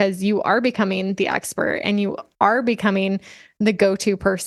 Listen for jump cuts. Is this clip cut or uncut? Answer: uncut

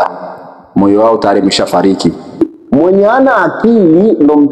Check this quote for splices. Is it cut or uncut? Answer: cut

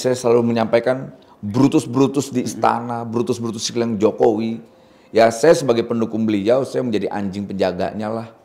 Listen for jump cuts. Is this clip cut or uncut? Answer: uncut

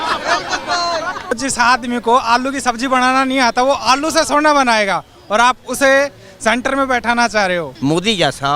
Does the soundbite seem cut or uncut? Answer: cut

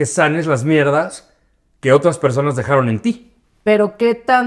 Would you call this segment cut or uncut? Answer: uncut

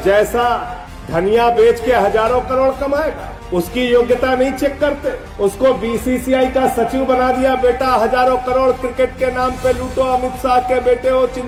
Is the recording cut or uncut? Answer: uncut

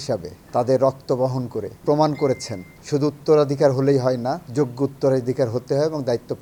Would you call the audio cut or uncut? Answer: uncut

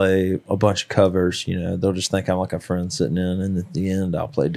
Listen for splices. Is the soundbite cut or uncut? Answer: uncut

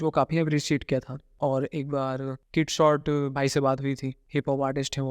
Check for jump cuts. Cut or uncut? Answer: cut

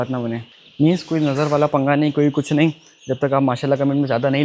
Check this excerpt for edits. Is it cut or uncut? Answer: uncut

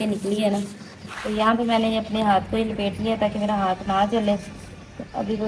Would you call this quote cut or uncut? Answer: uncut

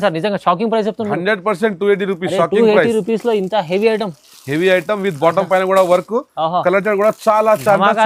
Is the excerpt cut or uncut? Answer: uncut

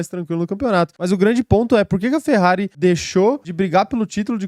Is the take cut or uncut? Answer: cut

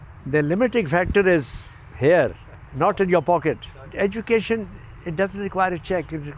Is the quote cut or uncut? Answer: cut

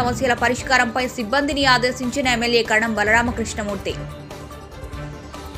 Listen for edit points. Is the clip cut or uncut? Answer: uncut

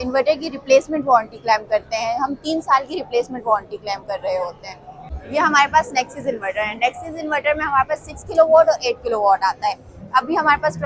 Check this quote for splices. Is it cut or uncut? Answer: cut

